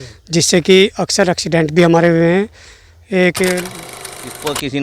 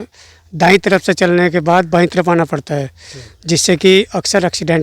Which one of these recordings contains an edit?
first; 1 cut; at 3.8 s

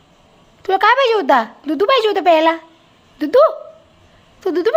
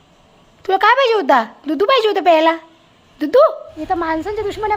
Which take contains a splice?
second; 1 cut; at 3.7 s

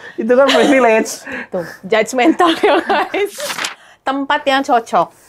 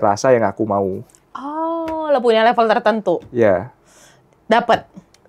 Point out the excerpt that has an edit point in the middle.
first; 1 cut; at 3.4 s

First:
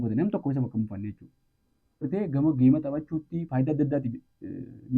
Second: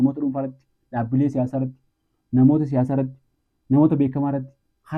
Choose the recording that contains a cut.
first; 1 cut; at 2.1 s

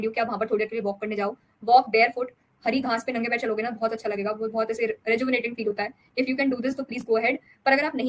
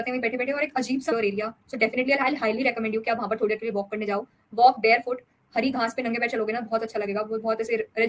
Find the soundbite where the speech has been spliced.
second; 1 cut; at 1.1 s

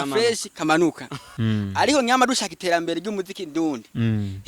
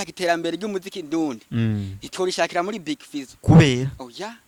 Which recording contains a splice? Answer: first; 1 cut; at 1.3 s

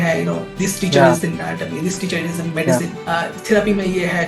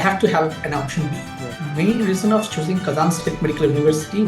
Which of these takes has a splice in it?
second; 1 cut; at 1.6 s

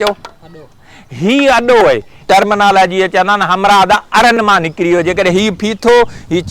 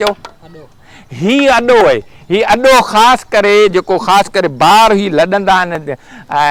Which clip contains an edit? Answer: first; 1 cut; at 2.2 s

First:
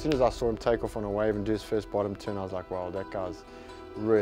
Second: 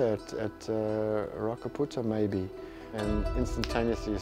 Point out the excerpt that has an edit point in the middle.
second; 1 cut; at 3.0 s

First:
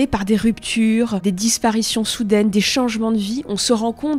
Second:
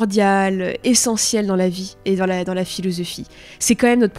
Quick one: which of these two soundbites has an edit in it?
first; 1 cut; at 1.2 s

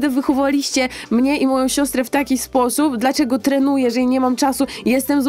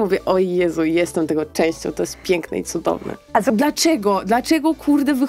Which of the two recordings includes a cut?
second; 1 cut; at 3.5 s

